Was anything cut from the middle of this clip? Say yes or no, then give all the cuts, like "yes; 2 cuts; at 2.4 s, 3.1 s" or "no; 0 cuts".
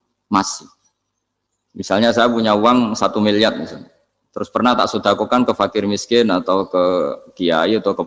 no; 0 cuts